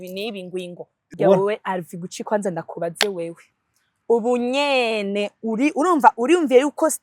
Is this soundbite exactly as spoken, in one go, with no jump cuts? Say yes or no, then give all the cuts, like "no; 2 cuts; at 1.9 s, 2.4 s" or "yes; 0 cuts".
no; 1 cut; at 1.1 s